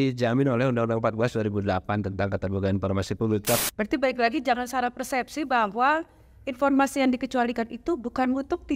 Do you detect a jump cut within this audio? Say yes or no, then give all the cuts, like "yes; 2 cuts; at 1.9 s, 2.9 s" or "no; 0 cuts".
yes; 1 cut; at 3.6 s